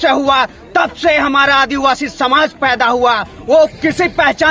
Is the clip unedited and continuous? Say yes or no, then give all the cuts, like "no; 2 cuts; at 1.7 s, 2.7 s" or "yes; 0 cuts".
yes; 0 cuts